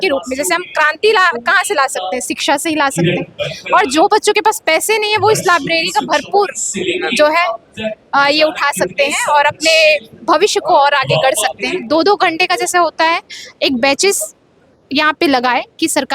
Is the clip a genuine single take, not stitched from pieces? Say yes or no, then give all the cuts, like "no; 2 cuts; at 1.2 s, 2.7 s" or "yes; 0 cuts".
no; 1 cut; at 11.8 s